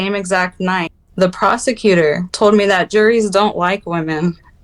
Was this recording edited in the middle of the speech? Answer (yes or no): yes